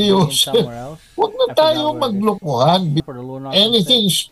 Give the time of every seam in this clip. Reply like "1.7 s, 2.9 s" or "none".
3.1 s